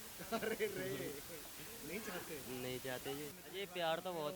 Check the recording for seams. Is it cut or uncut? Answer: cut